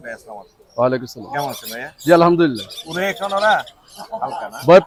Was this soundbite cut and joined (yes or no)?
no